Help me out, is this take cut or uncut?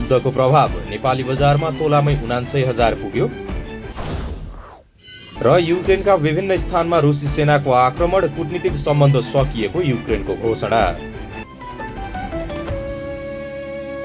cut